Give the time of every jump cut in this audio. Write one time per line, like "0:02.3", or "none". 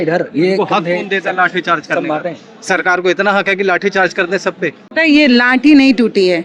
0:04.8